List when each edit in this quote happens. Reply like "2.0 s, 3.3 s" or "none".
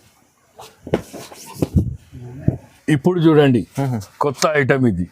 2.8 s